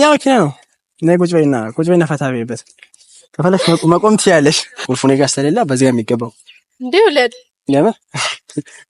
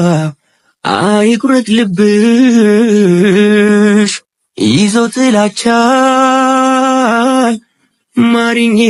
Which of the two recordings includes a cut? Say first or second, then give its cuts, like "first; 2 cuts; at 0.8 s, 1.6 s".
first; 1 cut; at 4.7 s